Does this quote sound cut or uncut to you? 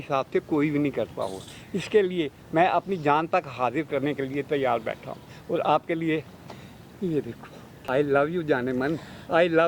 uncut